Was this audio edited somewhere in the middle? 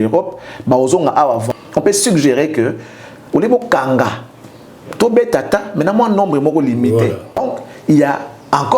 yes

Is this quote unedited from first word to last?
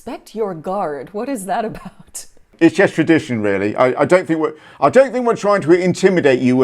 no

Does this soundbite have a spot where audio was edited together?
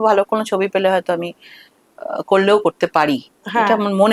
no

